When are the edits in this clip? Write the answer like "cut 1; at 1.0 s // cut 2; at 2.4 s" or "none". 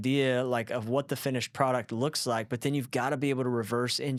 none